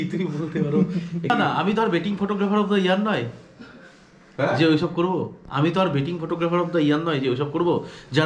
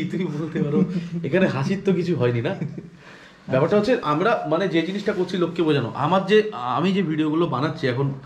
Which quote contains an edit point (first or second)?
first